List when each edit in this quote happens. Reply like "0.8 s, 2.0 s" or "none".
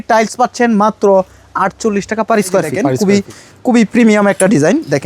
2.8 s